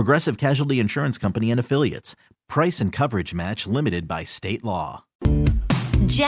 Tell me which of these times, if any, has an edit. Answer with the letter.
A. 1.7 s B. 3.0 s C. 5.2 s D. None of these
C